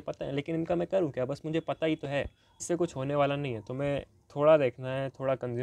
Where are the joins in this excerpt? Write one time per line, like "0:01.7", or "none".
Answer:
0:02.6